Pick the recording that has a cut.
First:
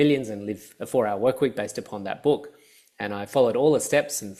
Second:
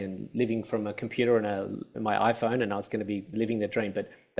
second; 2 cuts; at 1.9 s, 3.3 s

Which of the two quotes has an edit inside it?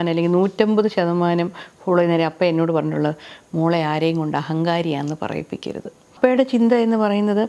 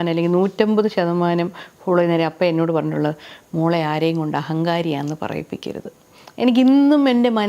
first; 1 cut; at 6.1 s

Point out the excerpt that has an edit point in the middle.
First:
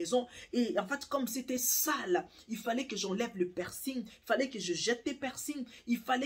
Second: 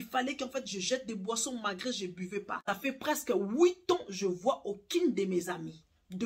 second; 1 cut; at 2.5 s

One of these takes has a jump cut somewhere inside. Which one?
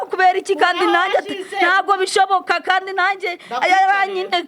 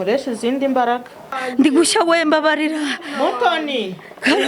second; 1 cut; at 1.4 s

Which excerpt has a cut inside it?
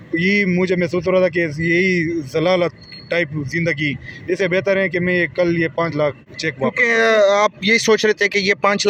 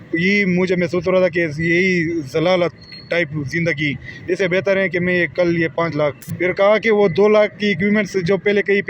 second; 1 cut; at 6.2 s

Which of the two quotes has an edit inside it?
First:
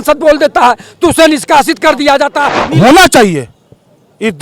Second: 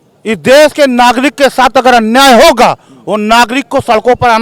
first; 1 cut; at 2.5 s

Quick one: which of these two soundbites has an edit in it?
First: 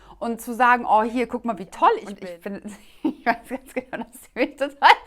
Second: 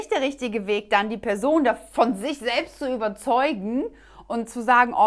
first; 1 cut; at 2.1 s

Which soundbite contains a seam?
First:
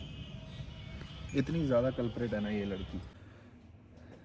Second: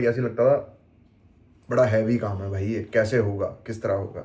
first; 1 cut; at 3.2 s

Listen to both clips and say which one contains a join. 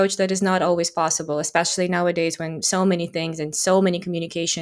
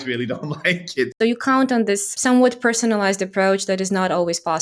second; 2 cuts; at 1.1 s, 2.1 s

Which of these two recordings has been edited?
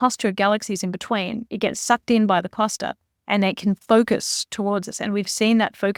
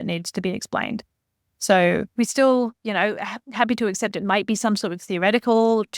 second; 1 cut; at 2.1 s

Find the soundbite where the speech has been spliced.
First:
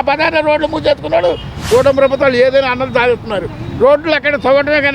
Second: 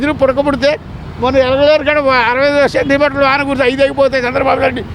first; 1 cut; at 1.5 s

